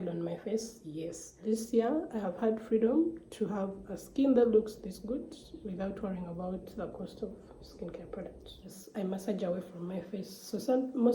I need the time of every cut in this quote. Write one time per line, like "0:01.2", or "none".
0:01.3
0:08.7

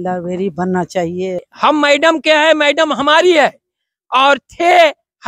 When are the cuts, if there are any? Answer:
0:01.5

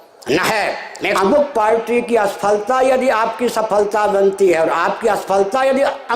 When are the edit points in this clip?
0:01.2

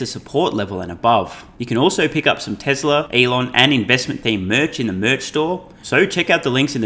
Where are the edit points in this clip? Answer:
0:01.5
0:03.1
0:05.8

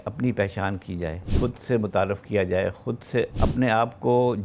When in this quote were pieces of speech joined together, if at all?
0:01.2
0:03.3

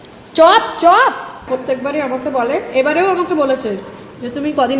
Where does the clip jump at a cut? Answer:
0:01.5

